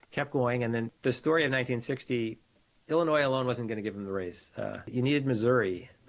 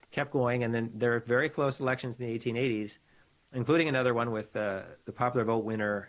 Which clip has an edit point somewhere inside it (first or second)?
first